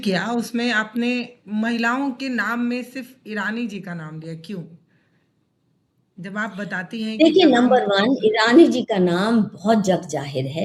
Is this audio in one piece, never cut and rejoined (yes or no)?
yes